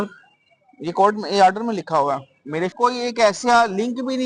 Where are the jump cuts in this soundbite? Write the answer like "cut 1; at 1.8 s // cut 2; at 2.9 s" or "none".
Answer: cut 1; at 2.7 s